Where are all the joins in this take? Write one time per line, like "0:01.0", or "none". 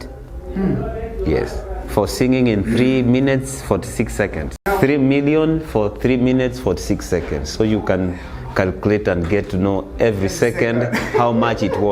0:04.7